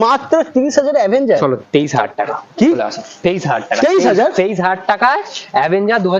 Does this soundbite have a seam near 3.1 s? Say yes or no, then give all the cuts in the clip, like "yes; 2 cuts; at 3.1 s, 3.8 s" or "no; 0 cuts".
no; 0 cuts